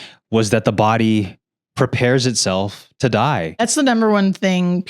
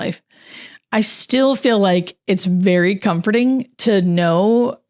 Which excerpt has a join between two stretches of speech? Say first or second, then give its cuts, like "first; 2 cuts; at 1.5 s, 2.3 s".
first; 1 cut; at 3.6 s